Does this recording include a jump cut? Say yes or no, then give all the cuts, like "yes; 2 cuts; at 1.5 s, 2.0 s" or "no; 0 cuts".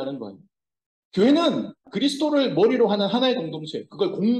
yes; 1 cut; at 1.9 s